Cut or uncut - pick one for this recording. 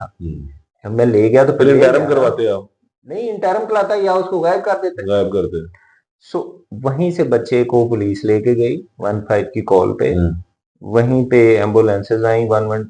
uncut